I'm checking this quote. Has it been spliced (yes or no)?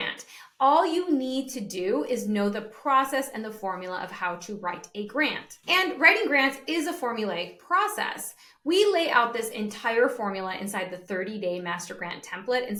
no